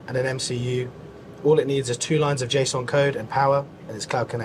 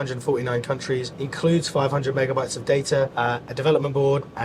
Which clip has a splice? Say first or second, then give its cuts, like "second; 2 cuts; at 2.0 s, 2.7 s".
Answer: second; 2 cuts; at 1.2 s, 3.1 s